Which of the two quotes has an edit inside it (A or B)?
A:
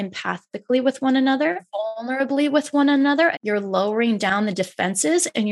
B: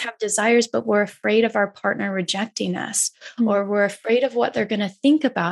A